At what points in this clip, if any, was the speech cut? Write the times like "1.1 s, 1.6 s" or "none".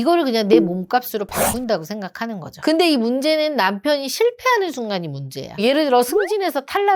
2.5 s